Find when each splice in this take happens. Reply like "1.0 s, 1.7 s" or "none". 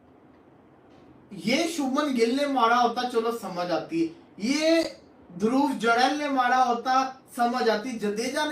none